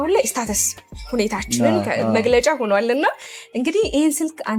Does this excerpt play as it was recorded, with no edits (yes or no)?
yes